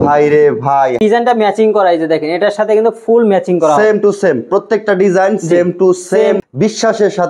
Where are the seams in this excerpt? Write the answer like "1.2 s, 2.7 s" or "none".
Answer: 1.0 s, 6.4 s